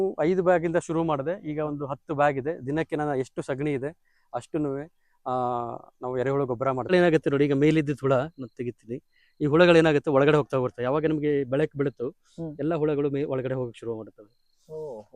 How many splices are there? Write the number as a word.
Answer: one